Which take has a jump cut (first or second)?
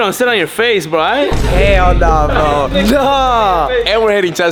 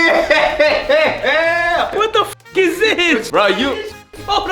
second